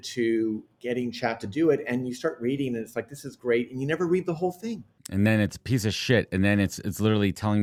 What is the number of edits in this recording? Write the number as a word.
zero